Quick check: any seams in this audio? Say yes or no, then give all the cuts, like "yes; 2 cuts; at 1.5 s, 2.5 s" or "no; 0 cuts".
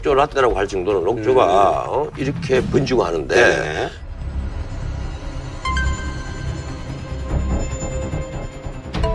yes; 1 cut; at 5.2 s